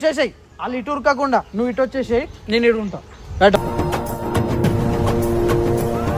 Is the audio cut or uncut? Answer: uncut